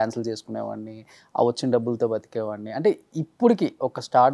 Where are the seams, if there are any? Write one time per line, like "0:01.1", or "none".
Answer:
none